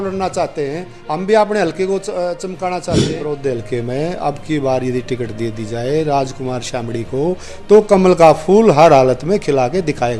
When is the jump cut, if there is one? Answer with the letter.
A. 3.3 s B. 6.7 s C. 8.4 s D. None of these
A